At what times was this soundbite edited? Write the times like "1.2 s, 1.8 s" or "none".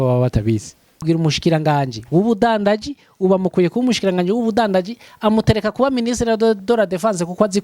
1.0 s

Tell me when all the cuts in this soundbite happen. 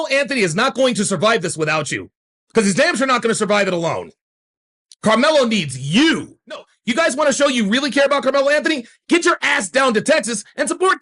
6.7 s

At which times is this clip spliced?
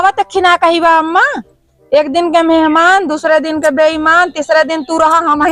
none

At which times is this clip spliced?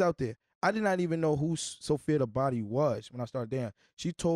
none

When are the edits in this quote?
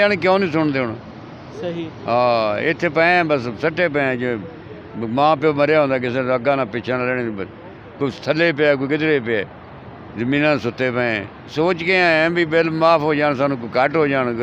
11.5 s

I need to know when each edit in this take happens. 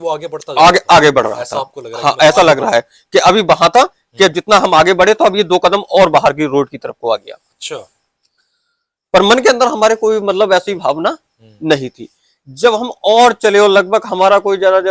none

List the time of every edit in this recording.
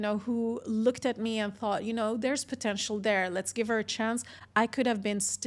none

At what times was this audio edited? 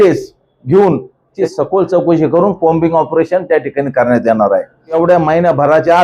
1.4 s, 4.9 s

